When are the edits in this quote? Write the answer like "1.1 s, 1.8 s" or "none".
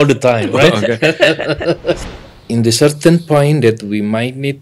2.0 s

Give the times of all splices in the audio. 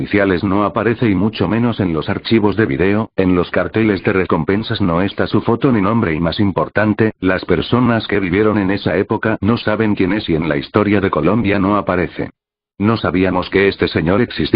5.1 s

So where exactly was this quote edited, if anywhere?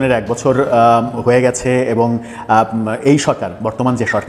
none

